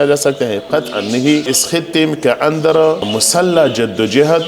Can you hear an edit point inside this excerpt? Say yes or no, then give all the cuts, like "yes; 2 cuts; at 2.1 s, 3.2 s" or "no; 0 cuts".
yes; 1 cut; at 3.1 s